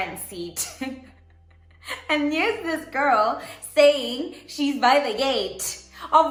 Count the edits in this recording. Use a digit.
0